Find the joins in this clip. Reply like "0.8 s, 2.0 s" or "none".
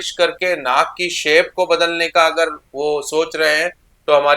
none